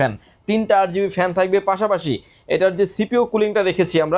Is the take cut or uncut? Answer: uncut